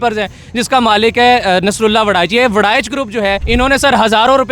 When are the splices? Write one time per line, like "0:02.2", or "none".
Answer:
0:03.4